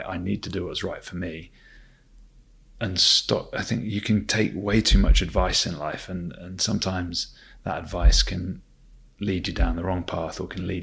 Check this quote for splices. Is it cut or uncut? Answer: uncut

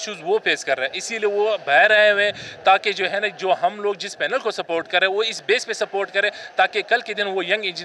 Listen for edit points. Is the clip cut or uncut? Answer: uncut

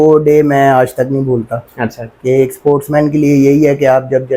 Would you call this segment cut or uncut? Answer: uncut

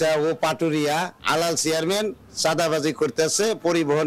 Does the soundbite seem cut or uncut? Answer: cut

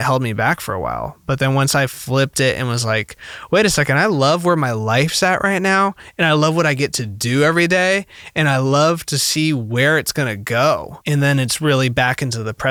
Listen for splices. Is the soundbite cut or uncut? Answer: uncut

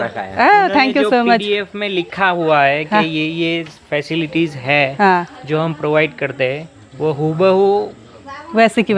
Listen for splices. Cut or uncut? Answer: uncut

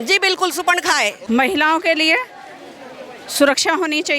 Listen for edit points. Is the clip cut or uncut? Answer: cut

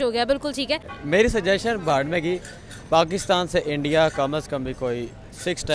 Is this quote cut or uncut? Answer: cut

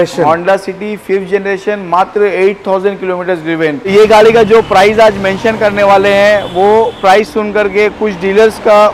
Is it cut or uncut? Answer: cut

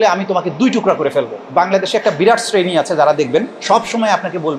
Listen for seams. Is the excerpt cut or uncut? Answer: cut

